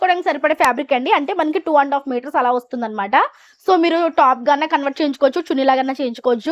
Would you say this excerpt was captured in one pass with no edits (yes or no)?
yes